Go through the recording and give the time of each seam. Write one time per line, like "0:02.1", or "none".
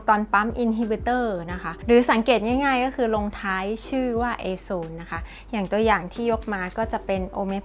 none